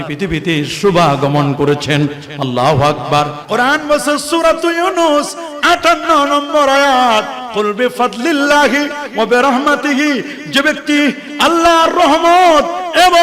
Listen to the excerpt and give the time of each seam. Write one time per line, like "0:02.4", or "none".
0:03.4